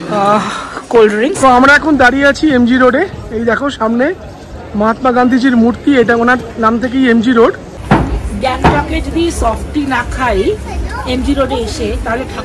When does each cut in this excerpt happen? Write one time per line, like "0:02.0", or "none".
0:01.4
0:07.7